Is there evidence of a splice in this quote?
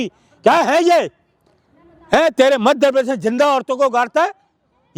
no; 0 cuts

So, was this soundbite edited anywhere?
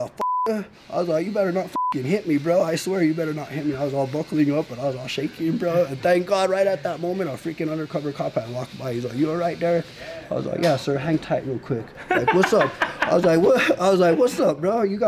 no; 0 cuts

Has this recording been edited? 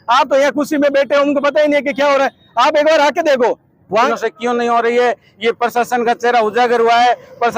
yes; 1 cut; at 4.1 s

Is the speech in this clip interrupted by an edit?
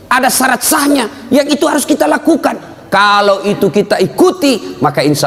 no; 0 cuts

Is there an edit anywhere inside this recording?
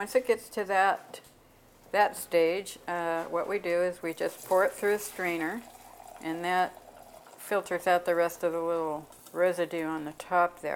yes; 1 cut; at 9.2 s

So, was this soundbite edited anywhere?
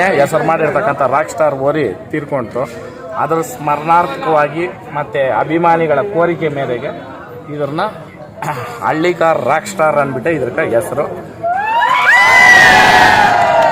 no; 0 cuts

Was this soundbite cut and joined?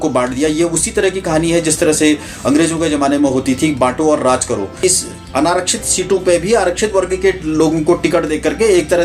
yes; 1 cut; at 4.7 s

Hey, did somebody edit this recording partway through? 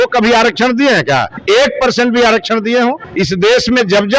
yes; 2 cuts; at 1.3 s, 3.0 s

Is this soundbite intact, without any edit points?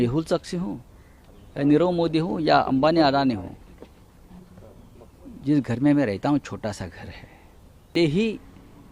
no; 1 cut; at 7.9 s

